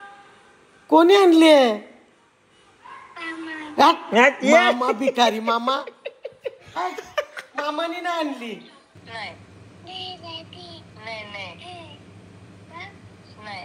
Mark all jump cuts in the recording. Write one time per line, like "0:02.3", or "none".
0:08.9